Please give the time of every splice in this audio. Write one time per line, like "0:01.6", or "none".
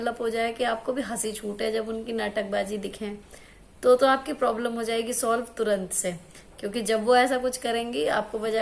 none

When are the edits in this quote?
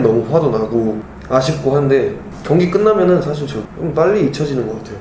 0:01.1
0:02.3
0:03.5

